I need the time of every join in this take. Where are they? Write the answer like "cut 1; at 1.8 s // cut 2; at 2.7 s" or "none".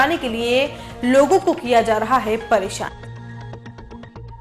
none